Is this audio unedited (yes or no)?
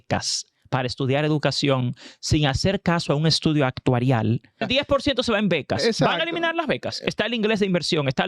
no